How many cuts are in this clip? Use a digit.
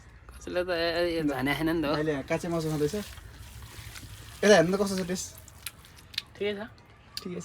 0